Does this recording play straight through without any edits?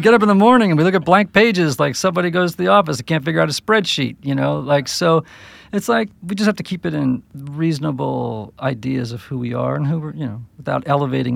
no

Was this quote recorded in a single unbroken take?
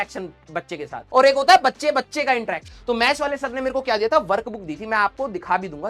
no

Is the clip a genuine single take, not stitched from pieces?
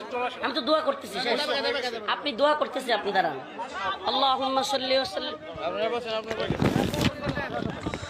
yes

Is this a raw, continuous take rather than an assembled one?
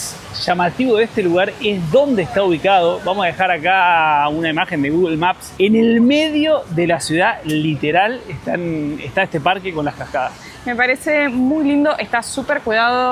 yes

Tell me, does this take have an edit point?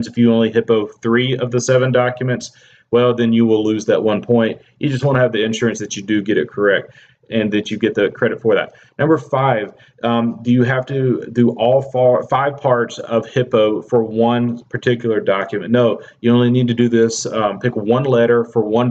no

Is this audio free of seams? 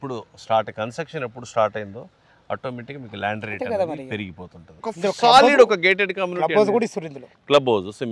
no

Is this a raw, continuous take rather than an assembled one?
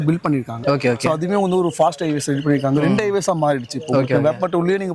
yes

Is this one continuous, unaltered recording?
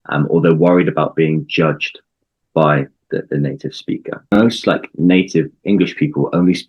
no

